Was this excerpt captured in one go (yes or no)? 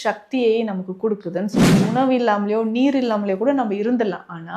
no